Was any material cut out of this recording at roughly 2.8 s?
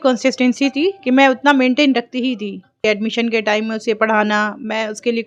yes; 1 cut; at 2.8 s

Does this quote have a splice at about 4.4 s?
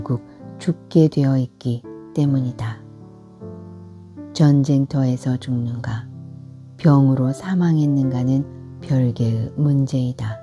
yes; 2 cuts; at 2.6 s, 4.4 s

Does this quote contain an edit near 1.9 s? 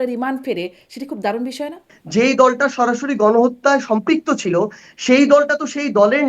yes; 1 cut; at 1.9 s

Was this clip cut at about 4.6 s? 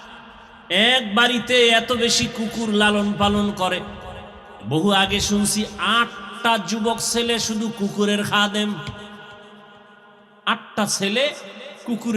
no; 0 cuts

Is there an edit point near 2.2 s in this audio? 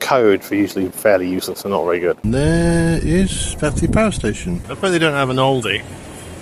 yes; 2 cuts; at 2.2 s, 4.7 s

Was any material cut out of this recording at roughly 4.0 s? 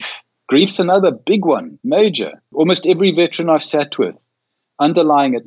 no; 2 cuts; at 1.7 s, 2.5 s

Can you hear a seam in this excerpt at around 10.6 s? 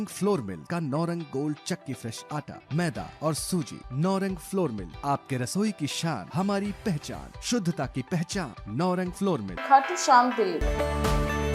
yes; 1 cut; at 10.6 s

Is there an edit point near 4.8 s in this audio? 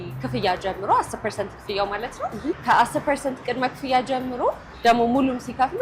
no; 1 cut; at 2.6 s

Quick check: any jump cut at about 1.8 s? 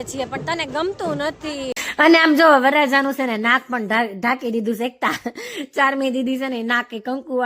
yes; 1 cut; at 1.8 s

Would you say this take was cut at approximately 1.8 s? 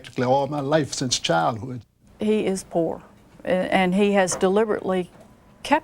yes; 1 cut; at 1.8 s

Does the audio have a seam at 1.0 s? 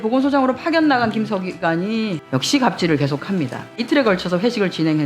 no; 2 cuts; at 2.2 s, 3.8 s

